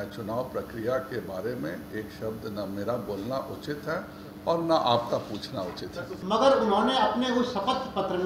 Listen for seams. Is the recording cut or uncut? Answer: cut